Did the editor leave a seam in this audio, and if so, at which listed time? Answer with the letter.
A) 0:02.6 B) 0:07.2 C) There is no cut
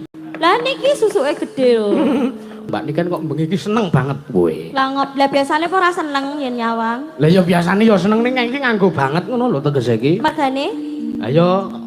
A